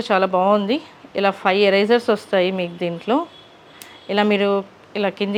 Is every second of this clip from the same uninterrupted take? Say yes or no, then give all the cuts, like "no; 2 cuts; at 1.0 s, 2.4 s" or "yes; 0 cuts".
yes; 0 cuts